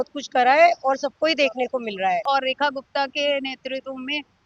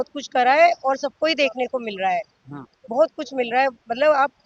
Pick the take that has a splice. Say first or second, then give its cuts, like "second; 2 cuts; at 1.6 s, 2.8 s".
first; 1 cut; at 2.2 s